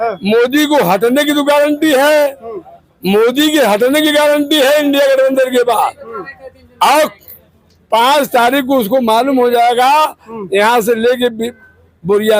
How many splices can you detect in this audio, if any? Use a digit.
0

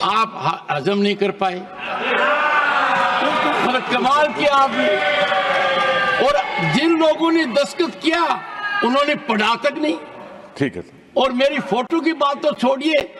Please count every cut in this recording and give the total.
0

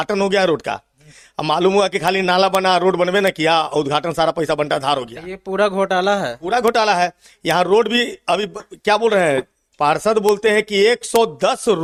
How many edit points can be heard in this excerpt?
0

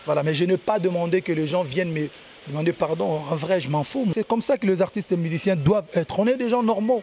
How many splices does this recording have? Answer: 1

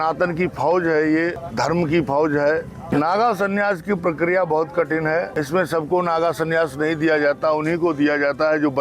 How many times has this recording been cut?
3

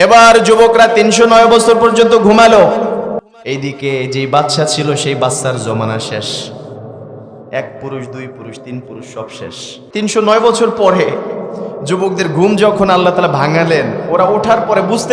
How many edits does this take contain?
2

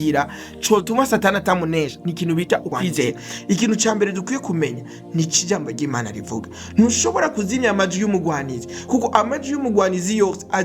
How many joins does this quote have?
1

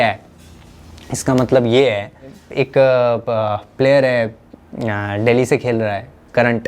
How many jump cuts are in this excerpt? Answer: 1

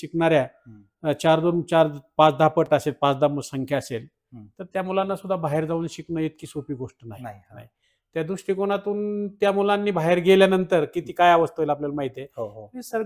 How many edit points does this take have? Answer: 0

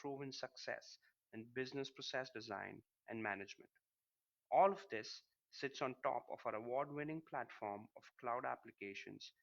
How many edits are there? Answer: 1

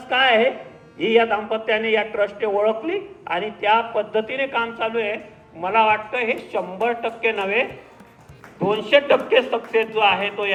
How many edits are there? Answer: 0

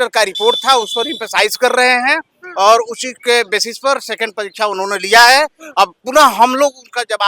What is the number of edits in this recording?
0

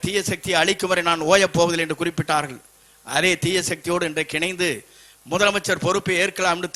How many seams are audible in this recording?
0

